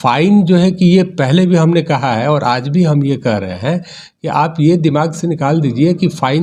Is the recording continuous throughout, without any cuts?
yes; 0 cuts

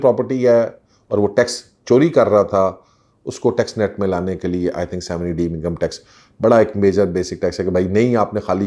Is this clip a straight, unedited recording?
yes; 0 cuts

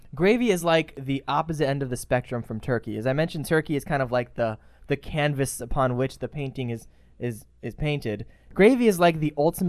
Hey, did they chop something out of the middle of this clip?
yes; 2 cuts; at 1.0 s, 8.4 s

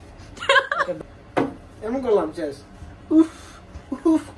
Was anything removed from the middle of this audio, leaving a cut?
yes; 1 cut; at 1.0 s

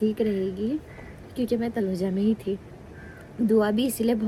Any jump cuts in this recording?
no; 0 cuts

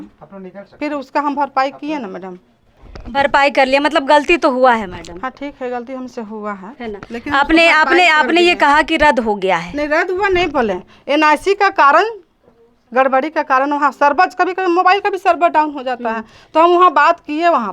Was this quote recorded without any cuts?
yes; 0 cuts

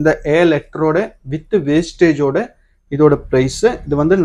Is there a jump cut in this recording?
no; 0 cuts

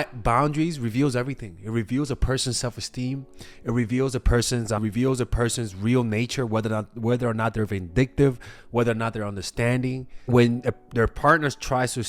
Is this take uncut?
no; 2 cuts; at 4.8 s, 10.2 s

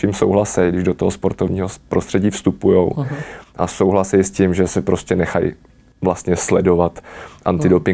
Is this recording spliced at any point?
no; 0 cuts

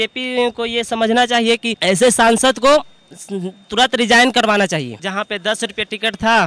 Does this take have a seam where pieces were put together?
yes; 2 cuts; at 1.7 s, 5.0 s

